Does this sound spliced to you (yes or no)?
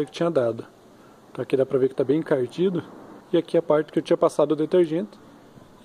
yes